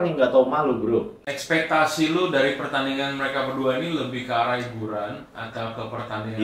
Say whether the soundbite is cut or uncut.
cut